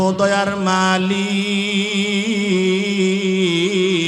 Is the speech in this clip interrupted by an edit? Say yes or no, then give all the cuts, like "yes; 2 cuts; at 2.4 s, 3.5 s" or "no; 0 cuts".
no; 0 cuts